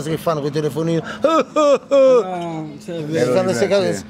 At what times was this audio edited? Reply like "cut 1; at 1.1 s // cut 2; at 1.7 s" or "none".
none